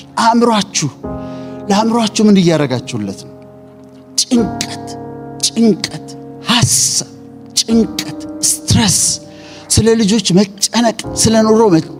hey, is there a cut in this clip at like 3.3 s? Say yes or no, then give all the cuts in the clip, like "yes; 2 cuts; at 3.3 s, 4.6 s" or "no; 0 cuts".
no; 0 cuts